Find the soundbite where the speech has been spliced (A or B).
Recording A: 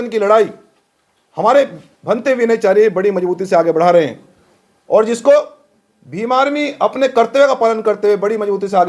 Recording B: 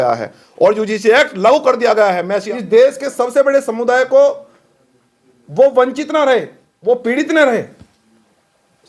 B